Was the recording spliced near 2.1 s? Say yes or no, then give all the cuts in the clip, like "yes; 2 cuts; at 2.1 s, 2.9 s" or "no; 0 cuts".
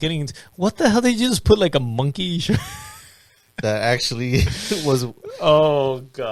no; 0 cuts